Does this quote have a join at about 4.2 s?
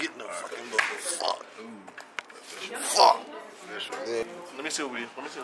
yes; 1 cut; at 4.2 s

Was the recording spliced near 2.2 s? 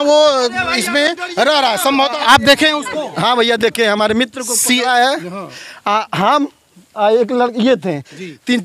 yes; 1 cut; at 2.2 s

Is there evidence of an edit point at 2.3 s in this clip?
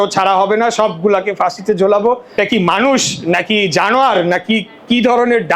yes; 1 cut; at 2.3 s

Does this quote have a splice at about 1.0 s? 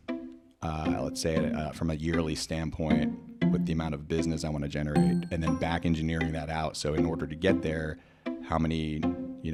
no; 0 cuts

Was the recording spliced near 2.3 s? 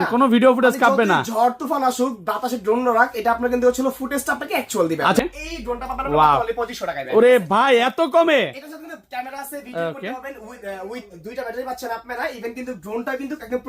no; 1 cut; at 5.2 s

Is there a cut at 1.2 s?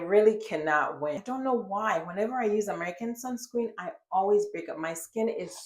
yes; 1 cut; at 1.2 s

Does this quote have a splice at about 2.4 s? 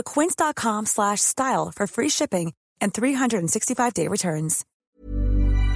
no; 1 cut; at 4.7 s

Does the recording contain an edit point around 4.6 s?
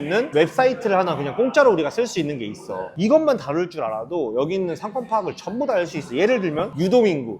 no; 0 cuts

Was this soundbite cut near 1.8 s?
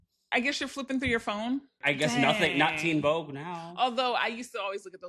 yes; 1 cut; at 1.8 s

